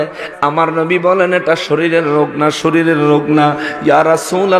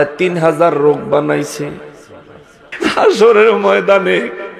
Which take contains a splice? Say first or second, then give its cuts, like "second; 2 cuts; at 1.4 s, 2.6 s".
second; 1 cut; at 2.8 s